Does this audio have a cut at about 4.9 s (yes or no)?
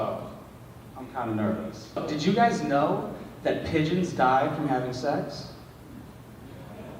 no